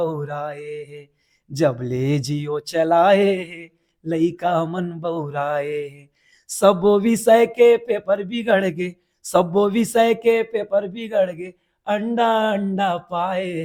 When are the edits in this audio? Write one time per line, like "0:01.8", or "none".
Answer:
none